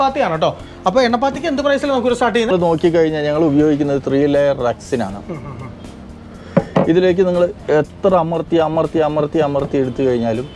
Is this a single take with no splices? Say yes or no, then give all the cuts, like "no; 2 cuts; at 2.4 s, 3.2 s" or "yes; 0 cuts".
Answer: no; 1 cut; at 2.5 s